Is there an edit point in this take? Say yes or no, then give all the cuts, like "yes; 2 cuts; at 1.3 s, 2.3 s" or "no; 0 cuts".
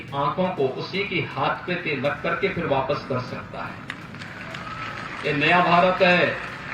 no; 0 cuts